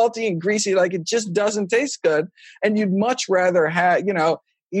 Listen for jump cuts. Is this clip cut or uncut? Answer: uncut